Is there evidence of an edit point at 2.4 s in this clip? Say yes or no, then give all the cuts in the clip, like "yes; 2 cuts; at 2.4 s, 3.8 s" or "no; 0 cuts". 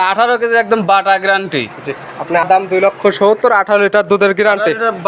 yes; 1 cut; at 2.4 s